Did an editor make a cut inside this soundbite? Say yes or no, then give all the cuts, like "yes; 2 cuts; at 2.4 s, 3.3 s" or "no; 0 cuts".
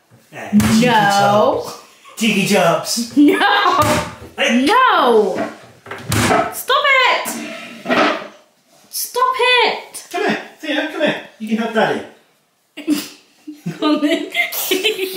no; 0 cuts